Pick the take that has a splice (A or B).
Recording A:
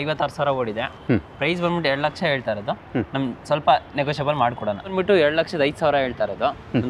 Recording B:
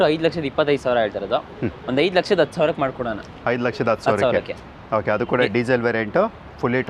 A